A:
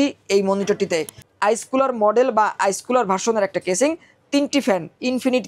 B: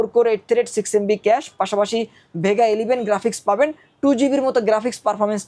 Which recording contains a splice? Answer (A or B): A